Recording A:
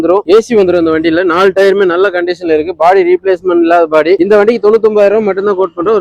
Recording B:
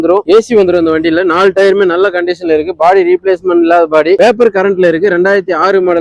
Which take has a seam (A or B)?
A